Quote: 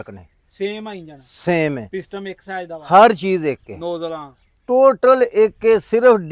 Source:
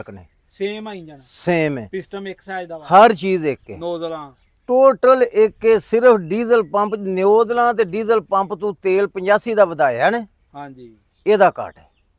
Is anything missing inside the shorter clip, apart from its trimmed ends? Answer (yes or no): no